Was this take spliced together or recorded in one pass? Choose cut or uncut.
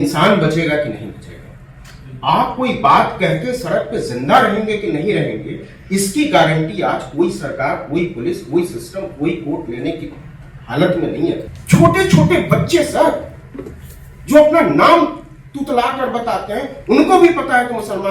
cut